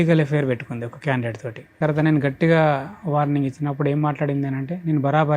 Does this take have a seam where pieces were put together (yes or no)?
yes